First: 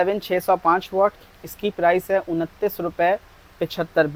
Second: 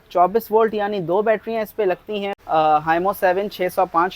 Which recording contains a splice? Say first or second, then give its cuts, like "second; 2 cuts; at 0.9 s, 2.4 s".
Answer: second; 1 cut; at 2.3 s